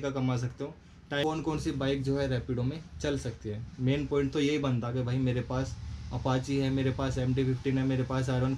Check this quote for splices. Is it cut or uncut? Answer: cut